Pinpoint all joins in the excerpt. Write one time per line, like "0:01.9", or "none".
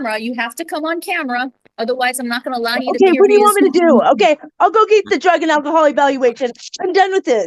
none